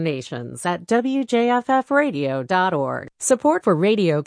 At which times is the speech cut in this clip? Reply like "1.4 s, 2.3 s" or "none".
3.1 s